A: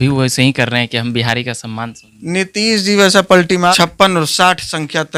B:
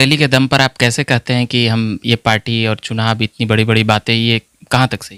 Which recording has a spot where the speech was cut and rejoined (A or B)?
A